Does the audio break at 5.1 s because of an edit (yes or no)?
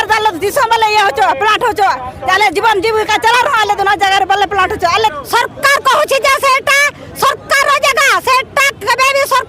yes